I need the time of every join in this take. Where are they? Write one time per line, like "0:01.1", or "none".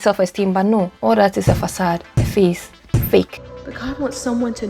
0:00.9
0:03.5